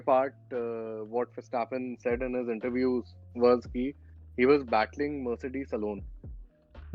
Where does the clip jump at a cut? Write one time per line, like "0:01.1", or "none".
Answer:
none